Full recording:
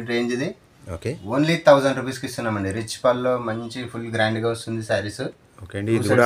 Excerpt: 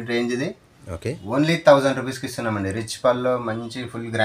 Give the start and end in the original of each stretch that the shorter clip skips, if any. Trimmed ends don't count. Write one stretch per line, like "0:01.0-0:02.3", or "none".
none

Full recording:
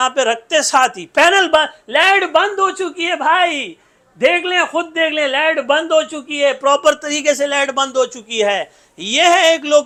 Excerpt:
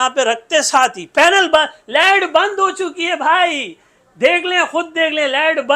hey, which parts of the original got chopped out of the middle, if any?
none

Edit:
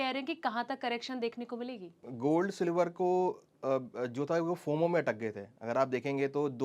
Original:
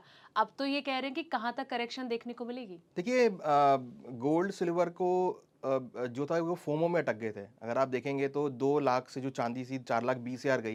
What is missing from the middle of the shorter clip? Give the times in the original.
0:02.9-0:04.0

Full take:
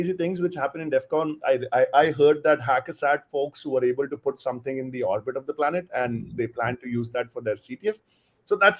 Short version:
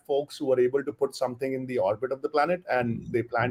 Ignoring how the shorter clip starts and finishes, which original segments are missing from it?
none

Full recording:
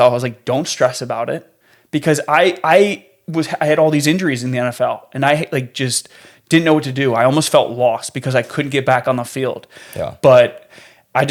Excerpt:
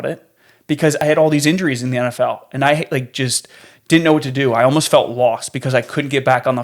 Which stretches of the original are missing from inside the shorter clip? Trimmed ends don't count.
0:02.2-0:03.6

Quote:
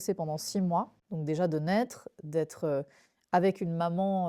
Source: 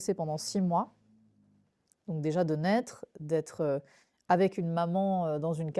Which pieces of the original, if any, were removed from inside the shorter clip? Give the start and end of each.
0:01.0-0:02.0

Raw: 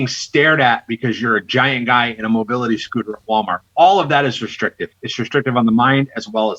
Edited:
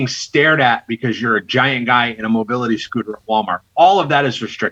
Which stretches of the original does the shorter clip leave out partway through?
none

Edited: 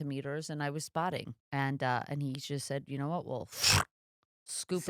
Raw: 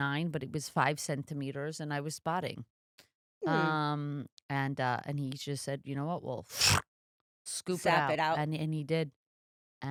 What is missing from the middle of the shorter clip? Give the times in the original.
0:02.7-0:04.3

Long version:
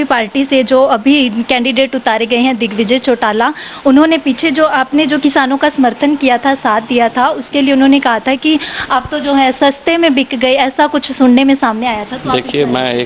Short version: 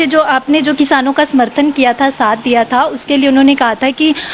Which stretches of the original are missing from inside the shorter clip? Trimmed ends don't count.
none

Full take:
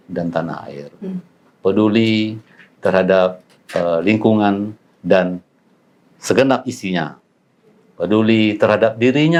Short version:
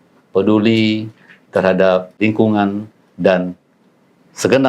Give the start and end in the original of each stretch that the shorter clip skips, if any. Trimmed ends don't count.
0:03.5-0:04.0

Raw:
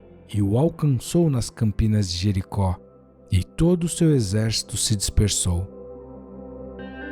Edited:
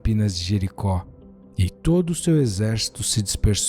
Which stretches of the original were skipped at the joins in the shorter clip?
none

